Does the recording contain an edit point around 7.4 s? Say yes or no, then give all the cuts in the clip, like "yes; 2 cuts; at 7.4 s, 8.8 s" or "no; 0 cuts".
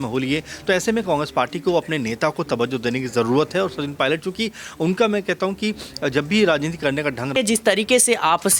yes; 1 cut; at 7.4 s